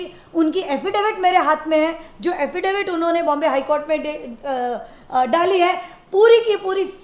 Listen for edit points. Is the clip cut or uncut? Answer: uncut